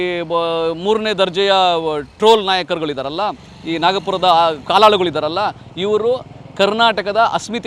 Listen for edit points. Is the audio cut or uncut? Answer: uncut